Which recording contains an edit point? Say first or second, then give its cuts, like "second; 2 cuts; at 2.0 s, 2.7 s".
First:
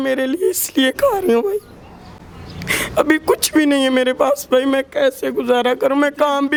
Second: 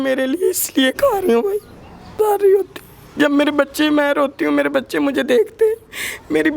second; 1 cut; at 2.2 s